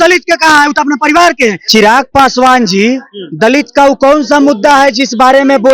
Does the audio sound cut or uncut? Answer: cut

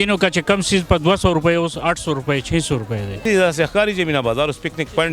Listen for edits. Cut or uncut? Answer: cut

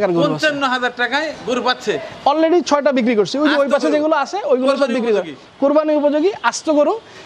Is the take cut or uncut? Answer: uncut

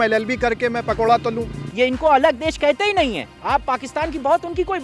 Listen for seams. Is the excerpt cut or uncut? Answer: cut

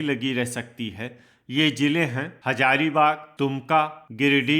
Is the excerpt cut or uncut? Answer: cut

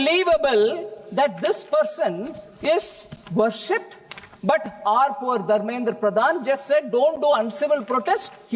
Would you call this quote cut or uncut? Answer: uncut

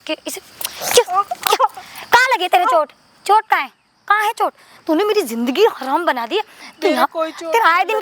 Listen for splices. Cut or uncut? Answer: uncut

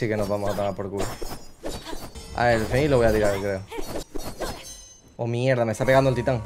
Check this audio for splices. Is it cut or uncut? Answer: cut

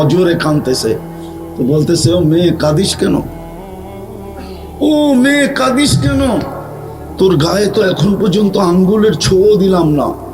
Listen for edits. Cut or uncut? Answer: cut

